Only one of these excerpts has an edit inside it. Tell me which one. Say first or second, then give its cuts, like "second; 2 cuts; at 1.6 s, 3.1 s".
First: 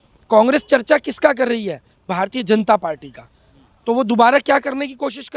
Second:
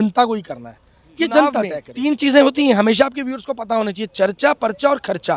second; 1 cut; at 1.8 s